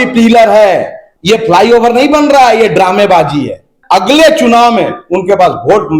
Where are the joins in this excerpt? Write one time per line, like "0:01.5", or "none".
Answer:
0:01.0
0:03.7